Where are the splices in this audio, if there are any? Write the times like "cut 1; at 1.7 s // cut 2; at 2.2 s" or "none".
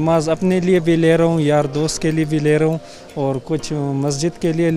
none